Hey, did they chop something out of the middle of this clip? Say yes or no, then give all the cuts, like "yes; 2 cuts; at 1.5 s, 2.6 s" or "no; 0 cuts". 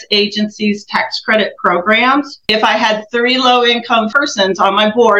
yes; 2 cuts; at 2.4 s, 4.1 s